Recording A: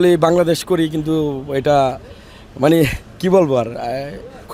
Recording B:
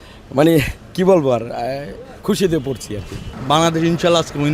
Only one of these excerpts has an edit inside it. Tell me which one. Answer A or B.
B